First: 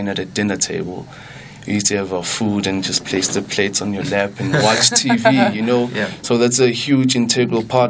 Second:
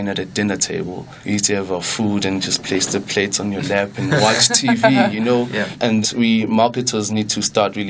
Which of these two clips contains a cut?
second; 2 cuts; at 1.1 s, 5.9 s

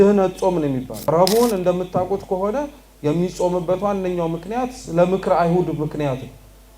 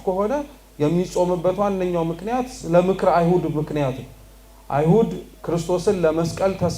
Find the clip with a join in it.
first; 1 cut; at 1.1 s

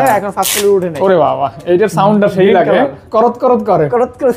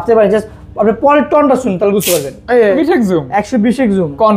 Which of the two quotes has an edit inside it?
second; 1 cut; at 2.7 s

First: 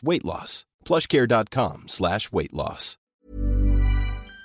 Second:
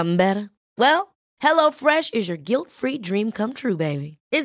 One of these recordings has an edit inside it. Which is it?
first; 1 cut; at 3.1 s

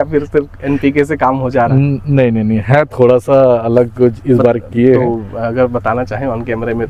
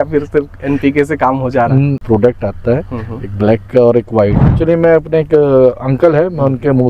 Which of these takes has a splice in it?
second; 2 cuts; at 2.0 s, 4.5 s

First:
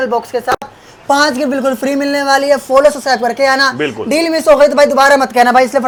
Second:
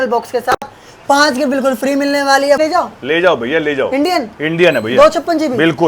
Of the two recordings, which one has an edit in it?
second; 1 cut; at 2.6 s

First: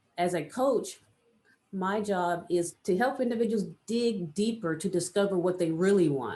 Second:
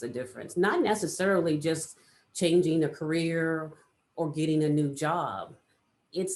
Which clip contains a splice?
first; 1 cut; at 2.7 s

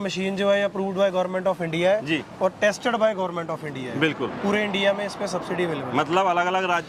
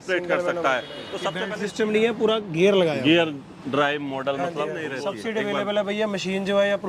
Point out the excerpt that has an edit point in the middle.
second; 2 cuts; at 1.5 s, 4.9 s

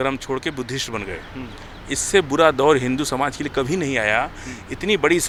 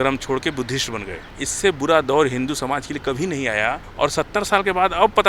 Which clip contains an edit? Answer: second; 2 cuts; at 1.2 s, 3.9 s

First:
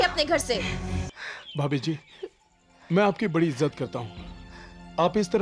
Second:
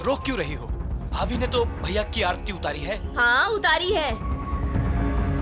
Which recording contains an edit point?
first; 1 cut; at 1.2 s

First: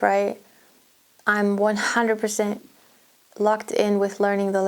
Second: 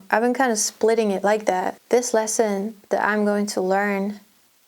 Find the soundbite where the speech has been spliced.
second; 1 cut; at 1.8 s

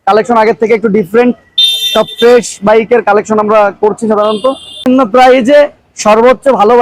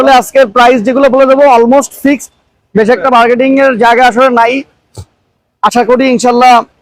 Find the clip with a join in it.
first; 1 cut; at 4.9 s

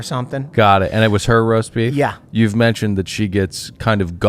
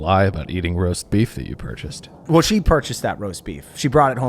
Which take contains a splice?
second; 1 cut; at 2.2 s

